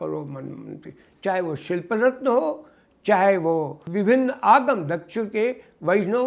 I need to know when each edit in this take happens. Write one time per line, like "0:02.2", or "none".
0:03.8